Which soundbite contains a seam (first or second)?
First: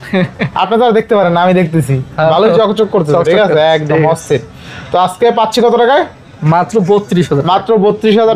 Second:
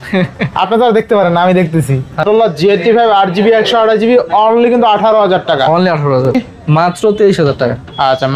second